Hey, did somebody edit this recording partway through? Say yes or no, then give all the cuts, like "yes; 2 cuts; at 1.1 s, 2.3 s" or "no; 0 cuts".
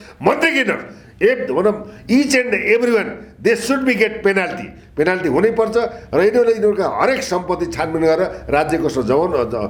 no; 0 cuts